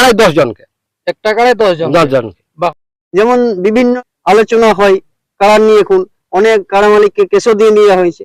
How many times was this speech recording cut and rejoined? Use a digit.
2